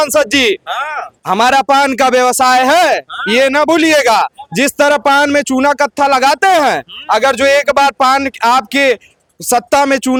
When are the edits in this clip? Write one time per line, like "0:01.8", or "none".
none